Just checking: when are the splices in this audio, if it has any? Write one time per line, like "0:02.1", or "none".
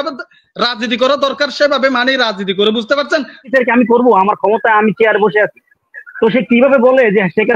0:03.5